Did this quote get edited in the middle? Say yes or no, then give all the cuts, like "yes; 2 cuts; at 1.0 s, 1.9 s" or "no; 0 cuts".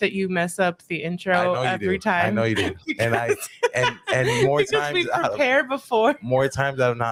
no; 0 cuts